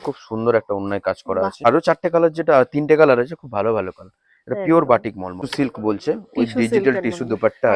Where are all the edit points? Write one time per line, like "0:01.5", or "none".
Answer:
0:01.6
0:05.4

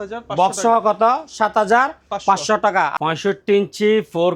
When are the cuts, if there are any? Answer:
0:02.9

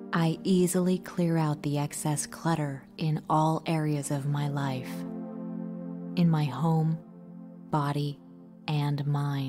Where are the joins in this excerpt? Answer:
none

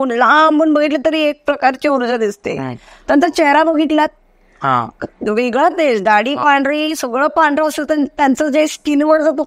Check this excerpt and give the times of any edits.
none

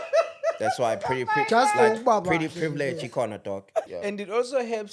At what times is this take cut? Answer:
0:03.8

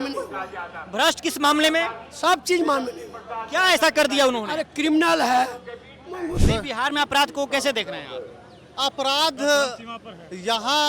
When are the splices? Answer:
0:06.4

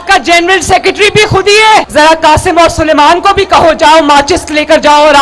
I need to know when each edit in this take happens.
0:01.9

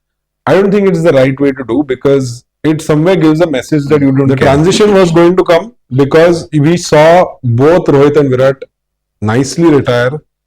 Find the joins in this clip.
0:04.3

